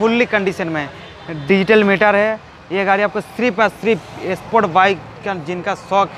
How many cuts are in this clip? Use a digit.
0